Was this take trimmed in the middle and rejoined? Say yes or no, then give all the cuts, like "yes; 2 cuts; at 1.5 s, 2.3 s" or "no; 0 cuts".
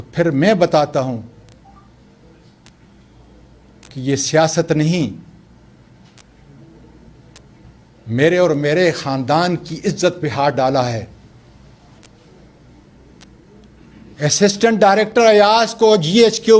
no; 0 cuts